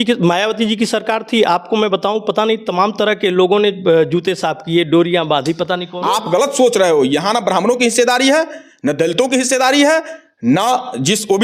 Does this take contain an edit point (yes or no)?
yes